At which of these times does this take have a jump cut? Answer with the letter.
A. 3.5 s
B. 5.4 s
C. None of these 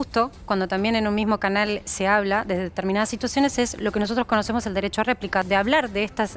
B